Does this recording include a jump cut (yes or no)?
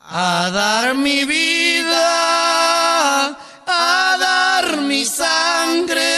no